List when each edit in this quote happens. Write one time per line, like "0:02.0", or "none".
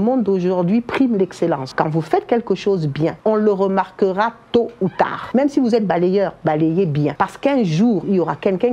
0:01.7
0:03.2
0:05.2
0:07.1